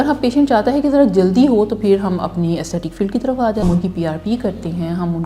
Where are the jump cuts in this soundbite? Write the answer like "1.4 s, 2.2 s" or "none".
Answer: 3.6 s